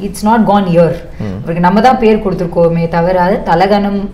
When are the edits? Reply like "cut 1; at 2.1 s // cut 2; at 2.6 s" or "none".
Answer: none